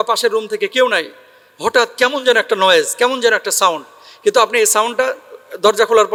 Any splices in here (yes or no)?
no